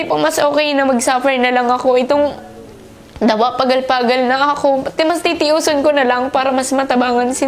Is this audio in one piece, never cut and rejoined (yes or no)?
yes